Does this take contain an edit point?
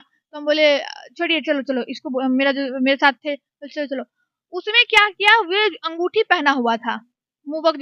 no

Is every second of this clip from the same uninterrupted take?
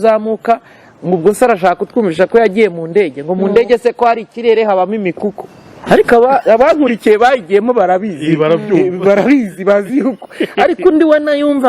yes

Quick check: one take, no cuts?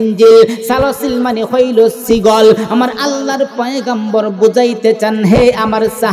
yes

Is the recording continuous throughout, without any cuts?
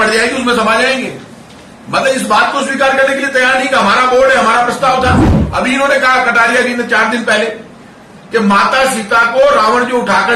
no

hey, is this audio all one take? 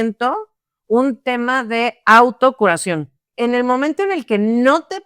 no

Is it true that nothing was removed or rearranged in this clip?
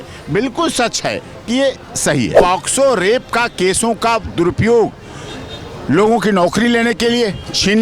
no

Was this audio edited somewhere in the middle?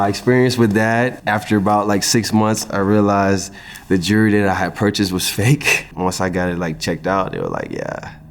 yes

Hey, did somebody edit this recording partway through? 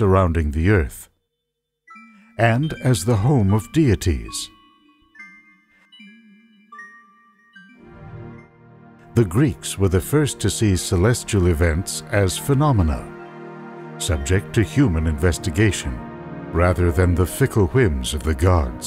yes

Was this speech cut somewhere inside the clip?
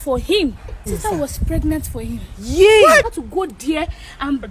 yes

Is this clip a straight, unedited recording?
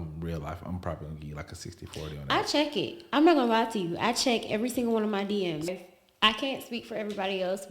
no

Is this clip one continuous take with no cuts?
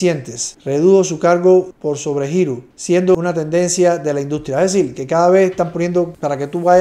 yes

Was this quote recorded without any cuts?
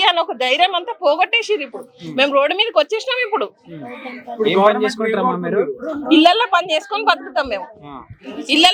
yes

